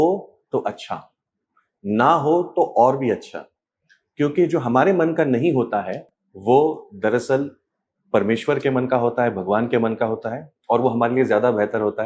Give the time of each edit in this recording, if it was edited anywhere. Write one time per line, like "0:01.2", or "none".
none